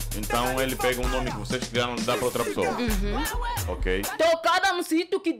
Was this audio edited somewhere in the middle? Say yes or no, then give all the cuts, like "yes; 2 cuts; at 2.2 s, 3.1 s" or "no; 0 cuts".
yes; 1 cut; at 4.1 s